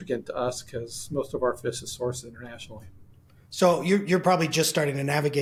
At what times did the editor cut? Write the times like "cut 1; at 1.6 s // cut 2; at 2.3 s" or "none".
none